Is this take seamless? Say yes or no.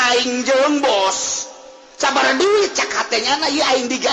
yes